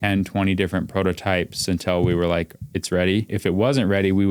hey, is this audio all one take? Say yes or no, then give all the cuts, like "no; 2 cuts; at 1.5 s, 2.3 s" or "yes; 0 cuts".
no; 1 cut; at 3.3 s